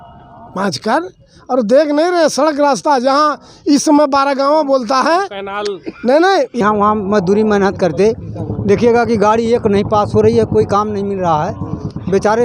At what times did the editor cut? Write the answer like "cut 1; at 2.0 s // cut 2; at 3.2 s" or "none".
cut 1; at 6.6 s